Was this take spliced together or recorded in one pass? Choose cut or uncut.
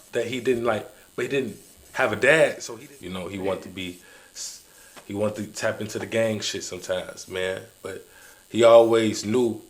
cut